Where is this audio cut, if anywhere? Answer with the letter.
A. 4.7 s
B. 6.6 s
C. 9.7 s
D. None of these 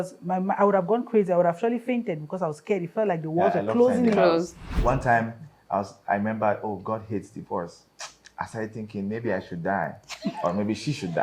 A